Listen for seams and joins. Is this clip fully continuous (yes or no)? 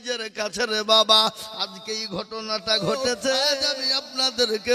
no